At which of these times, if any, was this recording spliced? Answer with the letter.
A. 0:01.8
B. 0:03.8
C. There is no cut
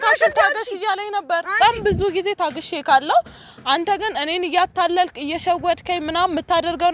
A